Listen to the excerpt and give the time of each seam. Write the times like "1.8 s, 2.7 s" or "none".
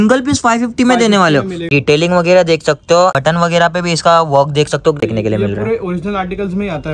1.7 s, 3.1 s, 5.0 s